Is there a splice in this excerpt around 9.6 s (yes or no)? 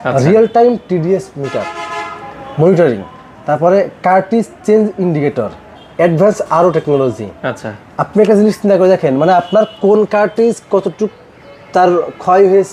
no